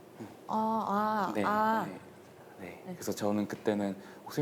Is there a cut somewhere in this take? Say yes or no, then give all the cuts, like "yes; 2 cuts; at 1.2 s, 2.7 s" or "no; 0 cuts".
no; 0 cuts